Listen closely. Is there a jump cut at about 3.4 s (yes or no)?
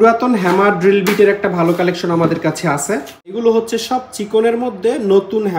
yes